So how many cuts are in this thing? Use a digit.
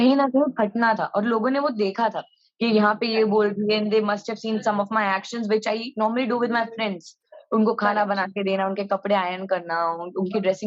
0